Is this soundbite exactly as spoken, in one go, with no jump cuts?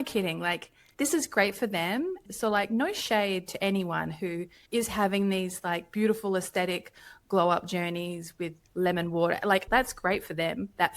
no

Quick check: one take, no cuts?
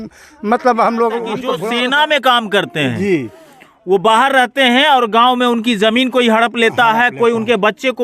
no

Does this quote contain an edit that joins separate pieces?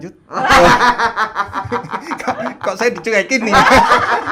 no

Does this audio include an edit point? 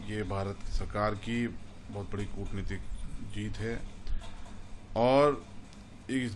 no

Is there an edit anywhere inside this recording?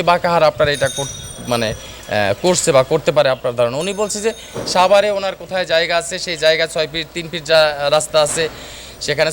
no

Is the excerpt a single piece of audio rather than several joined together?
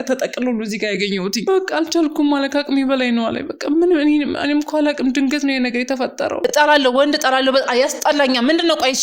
no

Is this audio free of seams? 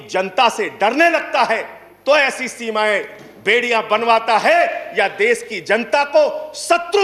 yes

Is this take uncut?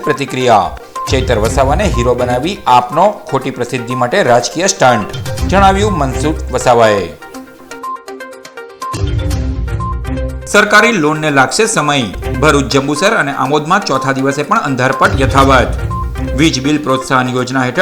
yes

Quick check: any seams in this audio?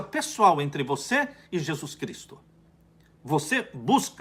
no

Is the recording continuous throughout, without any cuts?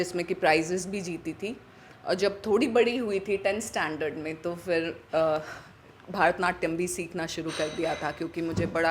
yes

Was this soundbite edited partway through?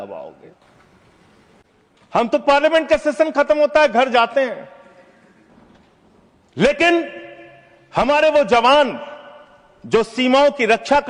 no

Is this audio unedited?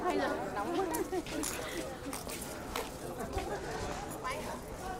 yes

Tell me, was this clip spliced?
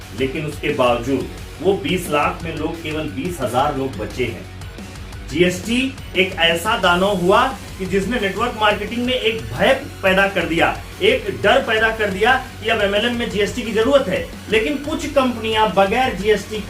no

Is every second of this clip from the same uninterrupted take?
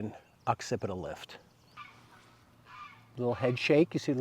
no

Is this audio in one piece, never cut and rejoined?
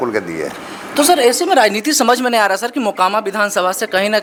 yes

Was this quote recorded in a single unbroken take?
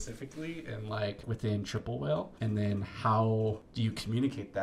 no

